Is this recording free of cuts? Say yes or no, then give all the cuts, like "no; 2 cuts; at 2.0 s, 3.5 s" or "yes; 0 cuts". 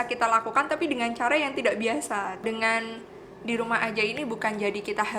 no; 1 cut; at 2.4 s